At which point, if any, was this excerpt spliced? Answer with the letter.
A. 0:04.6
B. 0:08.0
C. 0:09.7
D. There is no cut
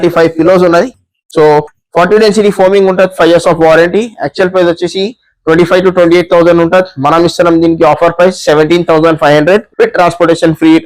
C